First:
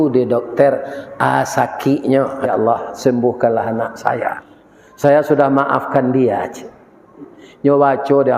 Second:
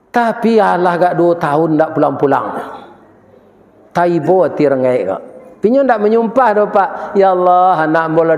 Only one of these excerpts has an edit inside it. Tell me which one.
first; 1 cut; at 2.5 s

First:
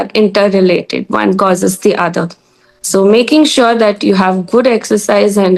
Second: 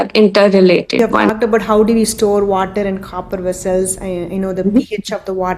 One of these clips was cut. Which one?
second; 1 cut; at 1.3 s

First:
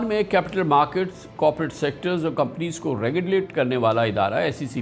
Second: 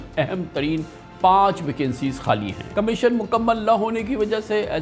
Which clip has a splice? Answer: second; 1 cut; at 2.6 s

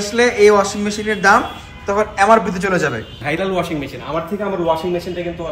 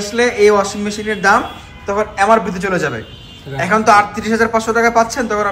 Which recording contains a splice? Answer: first; 1 cut; at 3.2 s

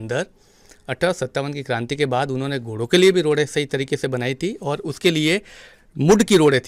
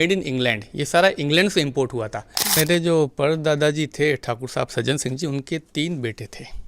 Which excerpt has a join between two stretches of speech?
second; 1 cut; at 2.6 s

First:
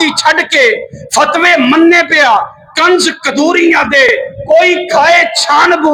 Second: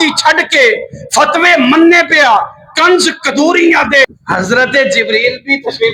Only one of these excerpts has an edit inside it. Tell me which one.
second; 1 cut; at 4.1 s

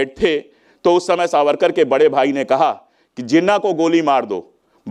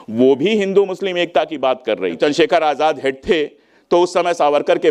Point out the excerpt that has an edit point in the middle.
second; 1 cut; at 2.2 s

